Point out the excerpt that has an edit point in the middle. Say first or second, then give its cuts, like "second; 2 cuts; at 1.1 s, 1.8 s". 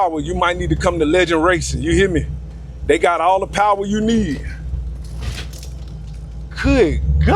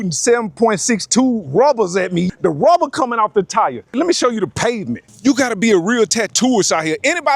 second; 3 cuts; at 2.3 s, 3.9 s, 5.1 s